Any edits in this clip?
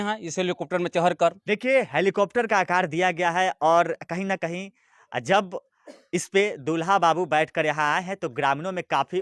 yes; 1 cut; at 1.4 s

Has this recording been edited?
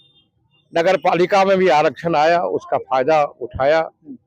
no; 0 cuts

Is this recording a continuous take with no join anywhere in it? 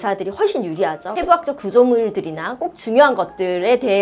no; 1 cut; at 1.1 s

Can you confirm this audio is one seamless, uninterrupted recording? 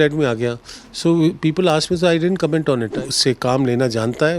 no; 1 cut; at 3.0 s

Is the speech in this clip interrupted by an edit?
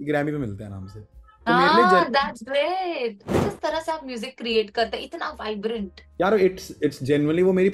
yes; 2 cuts; at 3.5 s, 6.0 s

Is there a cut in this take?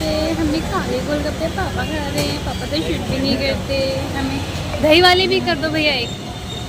no; 0 cuts

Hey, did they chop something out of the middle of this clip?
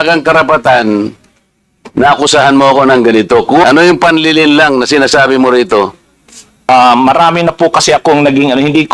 yes; 2 cuts; at 3.6 s, 6.7 s

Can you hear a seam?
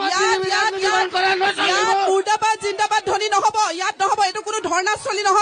no; 0 cuts

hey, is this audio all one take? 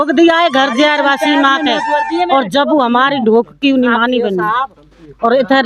yes; 0 cuts

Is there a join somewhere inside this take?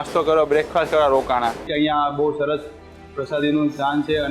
yes; 1 cut; at 1.6 s

